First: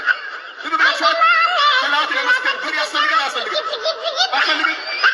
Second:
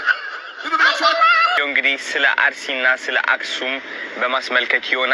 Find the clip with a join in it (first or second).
second